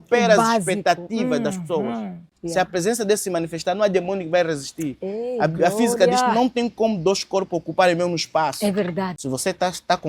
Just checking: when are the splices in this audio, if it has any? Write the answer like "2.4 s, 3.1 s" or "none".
2.3 s, 9.2 s

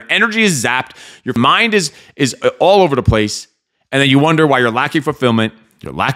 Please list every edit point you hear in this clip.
1.4 s

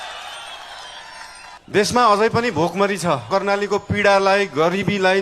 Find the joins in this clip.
1.6 s, 3.3 s

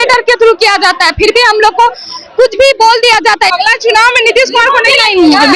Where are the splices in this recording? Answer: 3.5 s

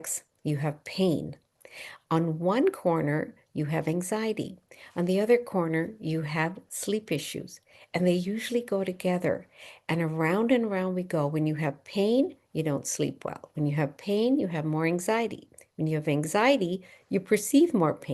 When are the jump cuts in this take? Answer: none

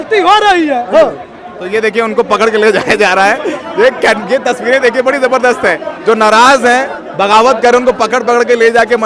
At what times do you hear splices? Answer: none

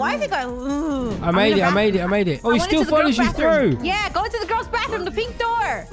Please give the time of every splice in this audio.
1.2 s

